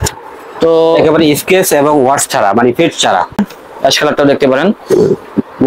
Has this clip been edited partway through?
yes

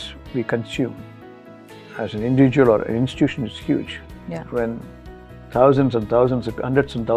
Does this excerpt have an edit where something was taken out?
no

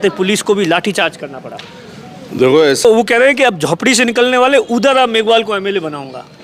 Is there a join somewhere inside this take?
yes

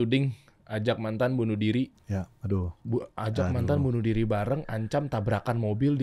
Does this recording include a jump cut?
no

